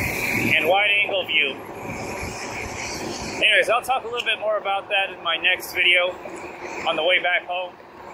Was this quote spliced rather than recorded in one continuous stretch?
no; 0 cuts

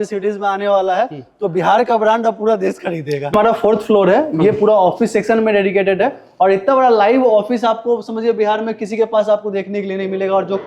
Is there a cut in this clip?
no; 0 cuts

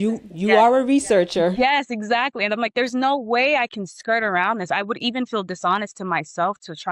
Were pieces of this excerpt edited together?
yes; 1 cut; at 1.5 s

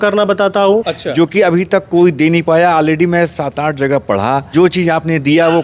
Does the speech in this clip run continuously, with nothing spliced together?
no; 2 cuts; at 1.0 s, 4.5 s

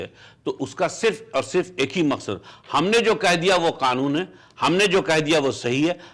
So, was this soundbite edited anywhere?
no; 0 cuts

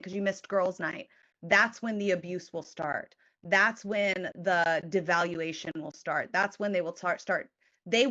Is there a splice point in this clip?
no; 0 cuts

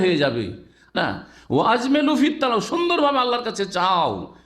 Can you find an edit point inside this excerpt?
yes; 1 cut; at 0.9 s

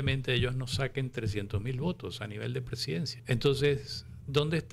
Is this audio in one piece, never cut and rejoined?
no; 1 cut; at 3.2 s

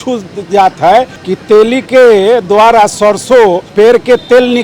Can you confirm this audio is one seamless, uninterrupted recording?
no; 2 cuts; at 1.2 s, 3.6 s

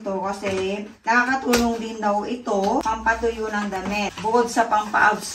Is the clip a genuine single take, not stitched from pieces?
yes; 0 cuts

